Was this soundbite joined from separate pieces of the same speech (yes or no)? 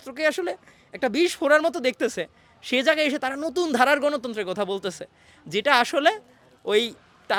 no